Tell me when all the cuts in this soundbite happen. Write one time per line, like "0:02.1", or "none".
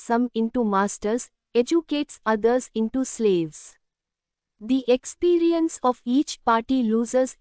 0:04.4

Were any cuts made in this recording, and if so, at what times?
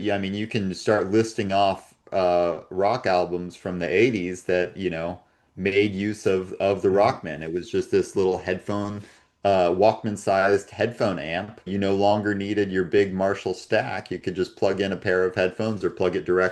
0:11.7

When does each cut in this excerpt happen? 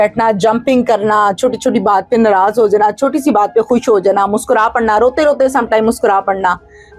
none

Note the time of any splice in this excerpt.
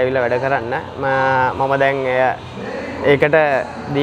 none

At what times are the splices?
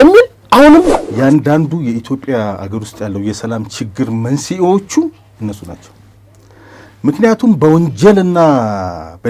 0:01.0

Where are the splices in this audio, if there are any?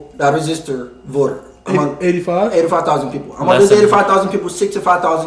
none

